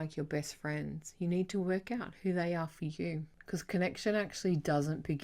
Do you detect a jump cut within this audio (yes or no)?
yes